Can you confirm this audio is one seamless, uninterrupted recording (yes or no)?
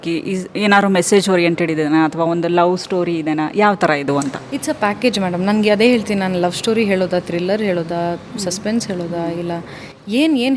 yes